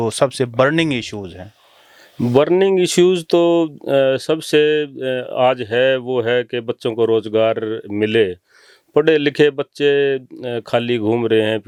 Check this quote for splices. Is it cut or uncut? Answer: uncut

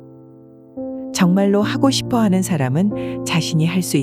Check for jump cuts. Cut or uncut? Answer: uncut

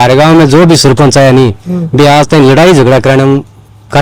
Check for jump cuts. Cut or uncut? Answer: uncut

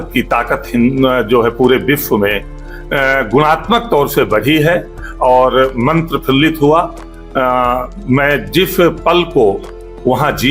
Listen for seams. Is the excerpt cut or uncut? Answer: uncut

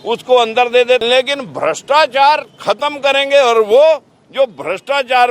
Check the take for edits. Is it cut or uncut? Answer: cut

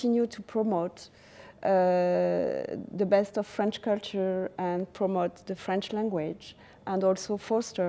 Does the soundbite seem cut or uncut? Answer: uncut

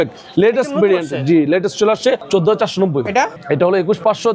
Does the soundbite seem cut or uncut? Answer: cut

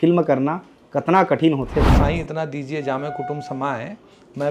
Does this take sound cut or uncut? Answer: cut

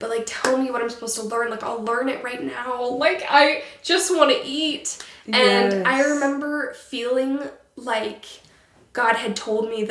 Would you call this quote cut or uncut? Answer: uncut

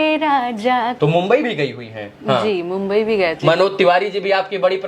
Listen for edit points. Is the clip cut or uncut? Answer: cut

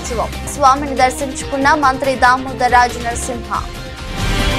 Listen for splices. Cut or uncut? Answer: uncut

